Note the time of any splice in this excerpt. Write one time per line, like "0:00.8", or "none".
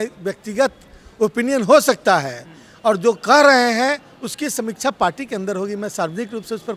none